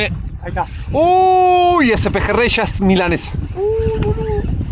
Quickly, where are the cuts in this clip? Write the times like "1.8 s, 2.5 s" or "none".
none